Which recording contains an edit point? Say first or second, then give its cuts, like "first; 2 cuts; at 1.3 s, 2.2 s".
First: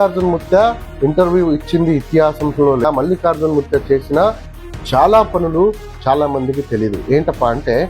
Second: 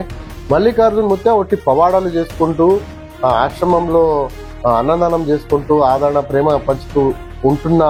first; 1 cut; at 2.8 s